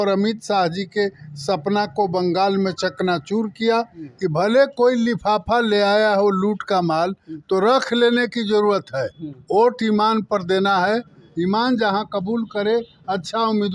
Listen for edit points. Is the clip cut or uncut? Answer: cut